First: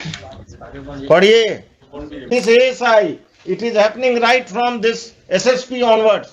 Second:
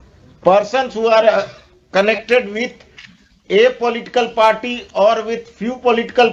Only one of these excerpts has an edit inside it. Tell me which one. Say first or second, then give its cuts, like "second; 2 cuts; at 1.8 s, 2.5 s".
first; 1 cut; at 2.3 s